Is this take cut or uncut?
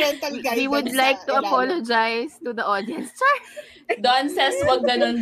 cut